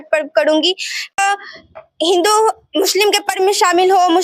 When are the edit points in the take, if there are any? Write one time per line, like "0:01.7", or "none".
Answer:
0:01.2